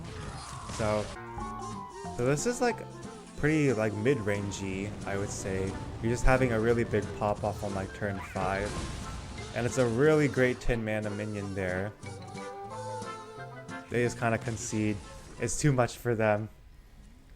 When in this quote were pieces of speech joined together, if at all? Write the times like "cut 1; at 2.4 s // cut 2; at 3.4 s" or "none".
cut 1; at 1.2 s